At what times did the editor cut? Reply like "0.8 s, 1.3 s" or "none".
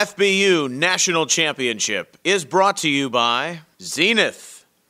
none